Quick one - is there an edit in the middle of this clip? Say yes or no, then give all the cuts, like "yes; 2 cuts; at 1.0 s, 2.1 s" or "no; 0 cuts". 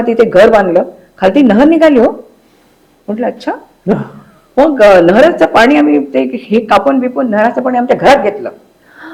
no; 0 cuts